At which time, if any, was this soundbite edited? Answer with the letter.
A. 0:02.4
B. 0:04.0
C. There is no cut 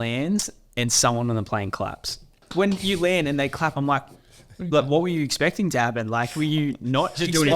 A